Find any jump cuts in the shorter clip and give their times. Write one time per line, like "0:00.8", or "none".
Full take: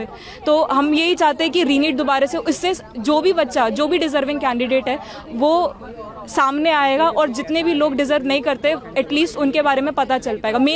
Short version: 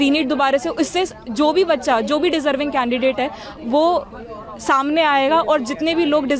none

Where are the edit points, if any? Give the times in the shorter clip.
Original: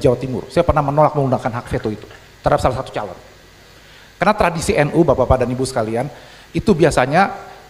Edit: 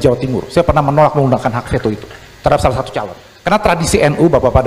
0:03.2

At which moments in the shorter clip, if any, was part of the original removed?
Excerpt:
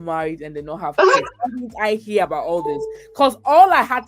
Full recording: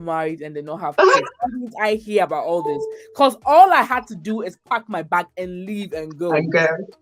none

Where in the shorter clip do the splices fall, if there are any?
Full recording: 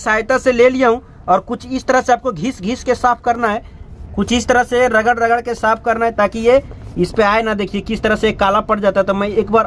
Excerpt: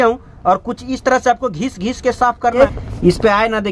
0:02.6

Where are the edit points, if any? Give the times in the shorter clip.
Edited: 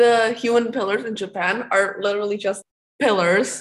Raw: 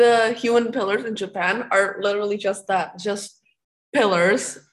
0:02.6

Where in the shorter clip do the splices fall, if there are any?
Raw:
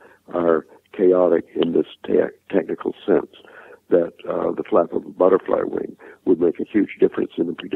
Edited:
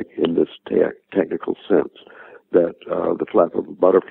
none

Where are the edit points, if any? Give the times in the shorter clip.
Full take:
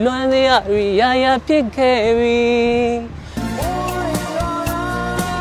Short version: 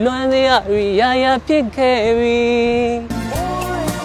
0:03.1

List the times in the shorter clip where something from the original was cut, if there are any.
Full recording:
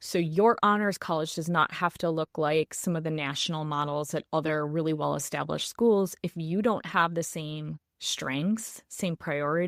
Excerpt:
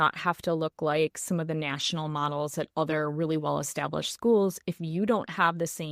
none

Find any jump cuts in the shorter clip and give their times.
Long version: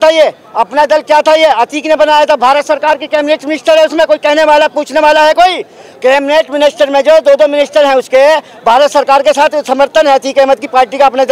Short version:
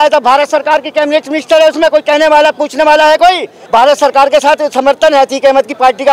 0:03.6

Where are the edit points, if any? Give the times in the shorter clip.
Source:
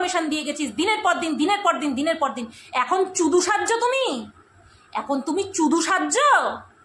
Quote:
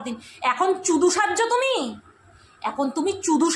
none

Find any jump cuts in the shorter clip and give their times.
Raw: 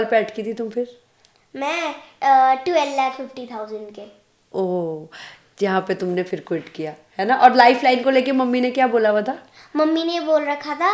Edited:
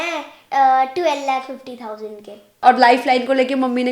0:02.6

